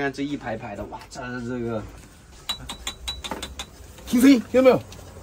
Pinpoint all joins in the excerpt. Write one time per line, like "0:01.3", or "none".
0:02.3

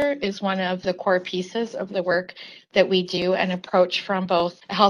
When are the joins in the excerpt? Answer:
none

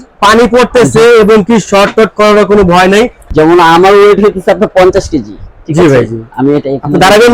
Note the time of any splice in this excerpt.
0:03.2

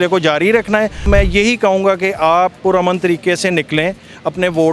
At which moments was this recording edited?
0:01.1

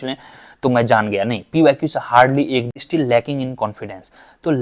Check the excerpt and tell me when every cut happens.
0:02.8

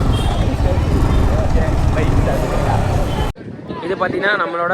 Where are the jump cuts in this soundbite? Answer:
0:03.3

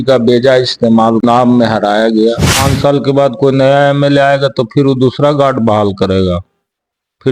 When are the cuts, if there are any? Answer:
0:01.2
0:02.6

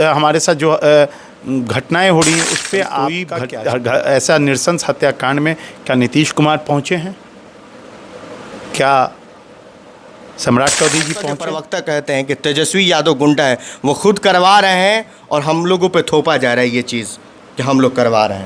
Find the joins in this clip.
0:03.3
0:11.5

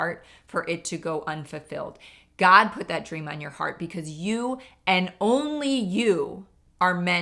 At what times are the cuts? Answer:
none

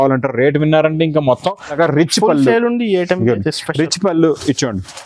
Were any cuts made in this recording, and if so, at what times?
0:01.7

